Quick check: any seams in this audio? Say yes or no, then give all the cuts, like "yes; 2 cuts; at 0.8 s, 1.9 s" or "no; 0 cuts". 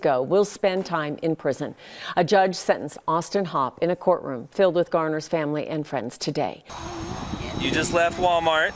no; 0 cuts